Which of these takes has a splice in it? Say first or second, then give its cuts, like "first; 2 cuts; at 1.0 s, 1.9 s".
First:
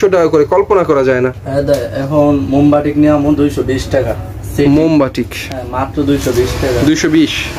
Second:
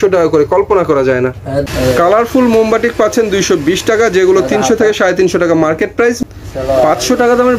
second; 2 cuts; at 1.6 s, 6.2 s